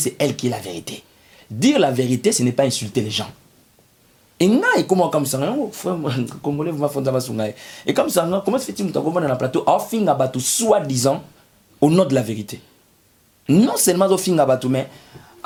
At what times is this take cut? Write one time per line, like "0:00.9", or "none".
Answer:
none